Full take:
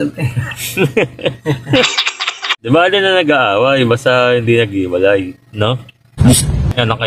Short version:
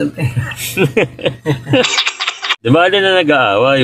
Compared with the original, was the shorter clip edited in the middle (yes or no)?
no